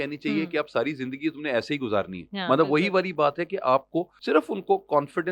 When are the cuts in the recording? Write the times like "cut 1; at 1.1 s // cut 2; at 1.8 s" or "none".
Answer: cut 1; at 4.1 s